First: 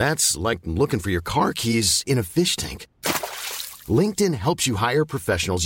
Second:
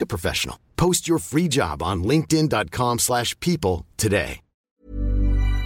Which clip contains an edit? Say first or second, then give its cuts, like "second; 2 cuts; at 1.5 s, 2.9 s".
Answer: second; 1 cut; at 4.8 s